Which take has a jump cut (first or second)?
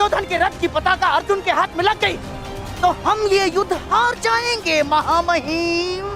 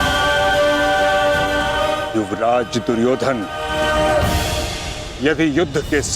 second